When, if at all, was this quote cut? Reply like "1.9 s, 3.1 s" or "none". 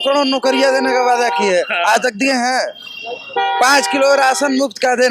none